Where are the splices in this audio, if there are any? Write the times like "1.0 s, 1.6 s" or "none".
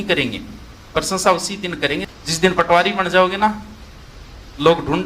2.1 s